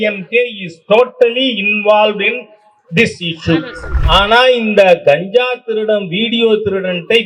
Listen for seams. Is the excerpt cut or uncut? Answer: cut